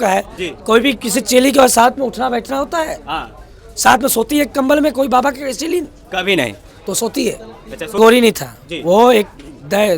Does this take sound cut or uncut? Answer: cut